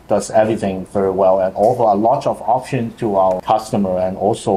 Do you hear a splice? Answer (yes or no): yes